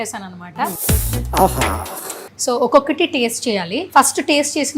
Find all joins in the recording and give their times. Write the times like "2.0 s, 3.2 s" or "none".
0.8 s, 2.3 s, 3.8 s